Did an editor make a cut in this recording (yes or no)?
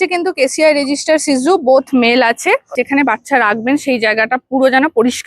yes